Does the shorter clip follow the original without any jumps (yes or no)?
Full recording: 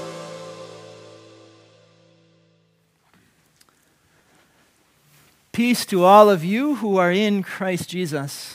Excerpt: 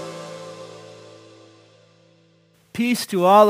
no